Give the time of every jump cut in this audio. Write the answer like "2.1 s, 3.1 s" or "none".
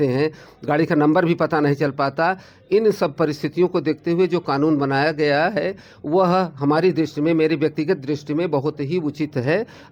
none